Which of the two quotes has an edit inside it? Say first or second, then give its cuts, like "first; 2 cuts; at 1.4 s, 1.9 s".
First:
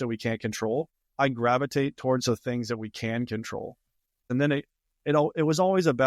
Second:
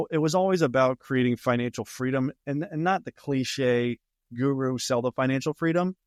first; 2 cuts; at 1.0 s, 4.3 s